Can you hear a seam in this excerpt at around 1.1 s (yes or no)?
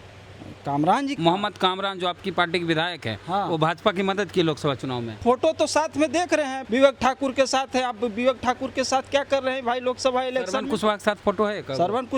yes